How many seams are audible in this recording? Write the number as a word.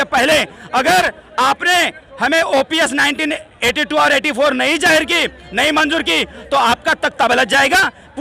zero